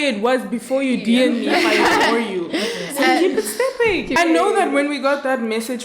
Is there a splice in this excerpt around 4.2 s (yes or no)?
yes